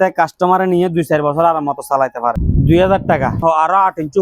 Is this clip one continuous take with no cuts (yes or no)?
no